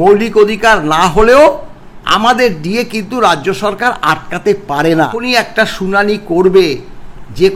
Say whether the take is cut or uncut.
cut